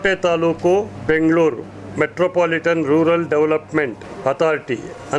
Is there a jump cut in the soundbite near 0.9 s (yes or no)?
yes